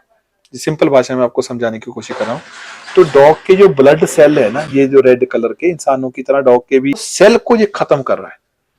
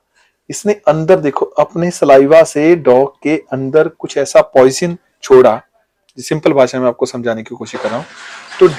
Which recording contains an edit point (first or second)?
first